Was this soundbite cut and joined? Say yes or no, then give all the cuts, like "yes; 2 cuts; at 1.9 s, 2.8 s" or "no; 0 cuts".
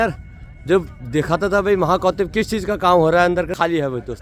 no; 0 cuts